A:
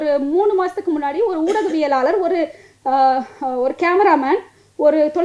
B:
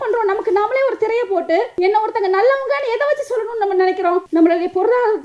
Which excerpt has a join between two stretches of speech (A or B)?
B